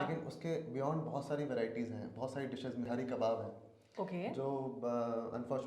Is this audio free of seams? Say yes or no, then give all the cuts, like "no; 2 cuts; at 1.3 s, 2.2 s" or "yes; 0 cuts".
no; 1 cut; at 2.8 s